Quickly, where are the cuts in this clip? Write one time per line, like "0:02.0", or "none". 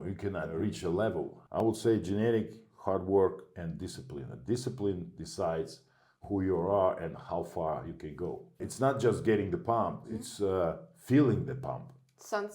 0:01.4
0:08.6

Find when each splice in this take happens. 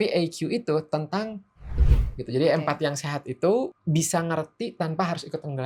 0:01.7
0:03.8

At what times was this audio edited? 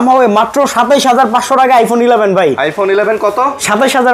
none

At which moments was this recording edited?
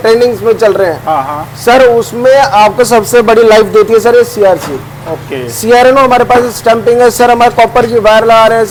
none

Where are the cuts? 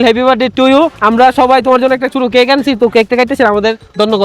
0:00.9

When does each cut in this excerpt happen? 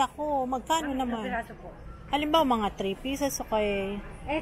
none

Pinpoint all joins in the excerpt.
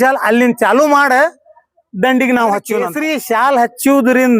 0:03.0

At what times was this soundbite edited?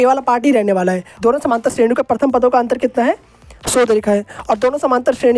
0:01.2

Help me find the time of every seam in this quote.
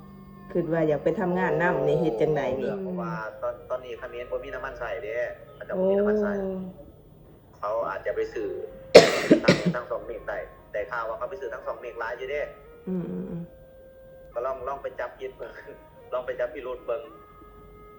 0:02.8

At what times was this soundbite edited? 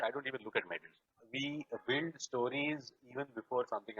0:01.2

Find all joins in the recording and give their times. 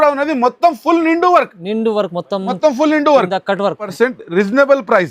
0:03.9

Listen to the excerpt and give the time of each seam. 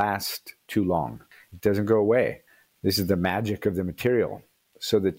0:01.4

